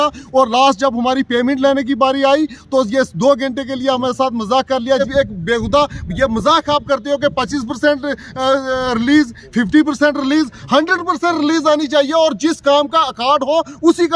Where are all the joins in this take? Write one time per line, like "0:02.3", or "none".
0:05.1